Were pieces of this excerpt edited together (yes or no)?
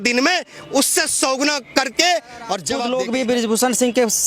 yes